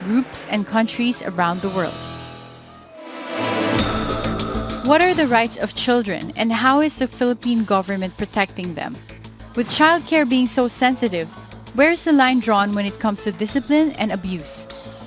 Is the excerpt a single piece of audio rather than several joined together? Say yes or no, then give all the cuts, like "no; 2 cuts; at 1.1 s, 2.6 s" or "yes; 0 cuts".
yes; 0 cuts